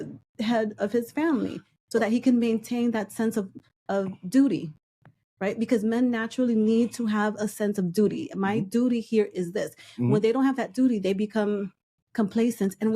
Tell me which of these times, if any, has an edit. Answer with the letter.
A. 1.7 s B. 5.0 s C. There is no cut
B